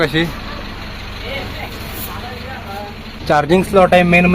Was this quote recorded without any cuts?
no; 1 cut; at 3.1 s

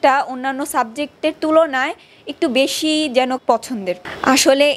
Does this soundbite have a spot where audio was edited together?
yes; 1 cut; at 3.8 s

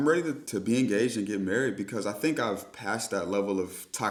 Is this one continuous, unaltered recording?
yes; 0 cuts

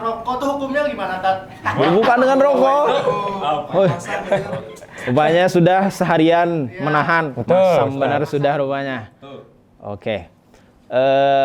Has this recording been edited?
no; 0 cuts

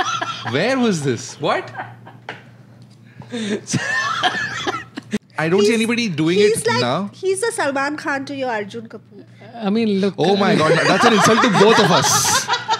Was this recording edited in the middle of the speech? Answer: yes; 1 cut; at 5.2 s

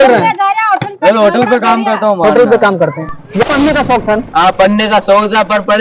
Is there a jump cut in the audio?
yes; 1 cut; at 3.4 s

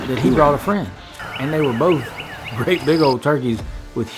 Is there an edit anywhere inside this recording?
no; 0 cuts

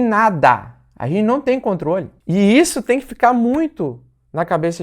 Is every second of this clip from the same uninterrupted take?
no; 1 cut; at 2.1 s

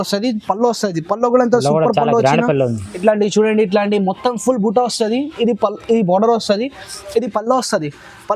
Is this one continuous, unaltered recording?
no; 1 cut; at 2.9 s

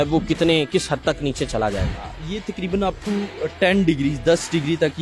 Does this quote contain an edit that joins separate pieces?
no; 0 cuts

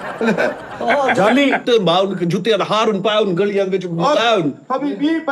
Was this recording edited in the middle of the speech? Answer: yes; 1 cut; at 1.6 s

